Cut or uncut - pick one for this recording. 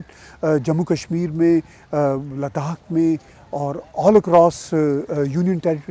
uncut